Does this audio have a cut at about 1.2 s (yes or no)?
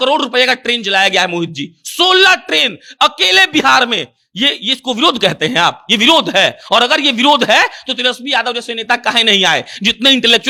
no